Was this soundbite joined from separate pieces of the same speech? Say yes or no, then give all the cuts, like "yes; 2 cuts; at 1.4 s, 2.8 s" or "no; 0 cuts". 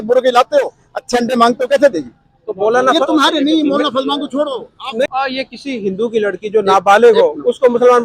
yes; 1 cut; at 5.1 s